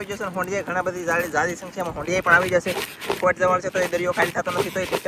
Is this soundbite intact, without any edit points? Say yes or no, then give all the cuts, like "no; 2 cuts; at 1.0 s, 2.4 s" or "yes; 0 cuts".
yes; 0 cuts